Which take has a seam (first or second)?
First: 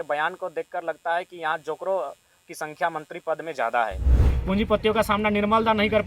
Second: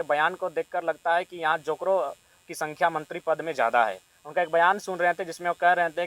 first